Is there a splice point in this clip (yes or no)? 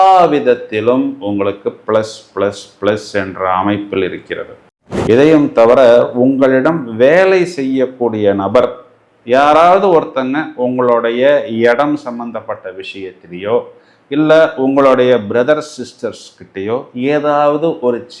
yes